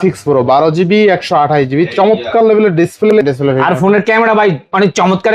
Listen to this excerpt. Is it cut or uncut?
cut